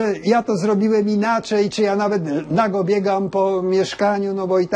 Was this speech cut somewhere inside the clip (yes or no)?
no